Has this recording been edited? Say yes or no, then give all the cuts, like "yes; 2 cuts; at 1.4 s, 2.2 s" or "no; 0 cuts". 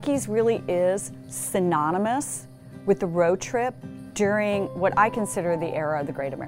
no; 0 cuts